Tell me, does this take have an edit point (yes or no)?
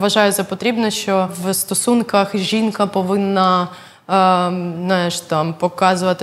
yes